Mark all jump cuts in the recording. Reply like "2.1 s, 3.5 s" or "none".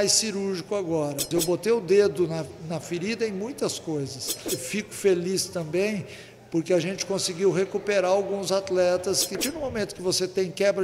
1.3 s, 4.6 s, 9.4 s